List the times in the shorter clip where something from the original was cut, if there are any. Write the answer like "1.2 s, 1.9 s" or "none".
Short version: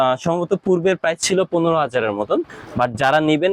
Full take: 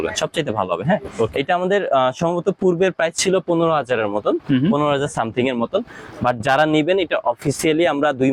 2.5 s